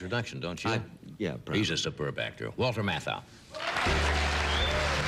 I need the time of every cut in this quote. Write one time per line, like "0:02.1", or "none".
0:02.5

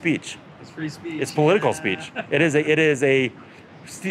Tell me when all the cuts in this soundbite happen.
none

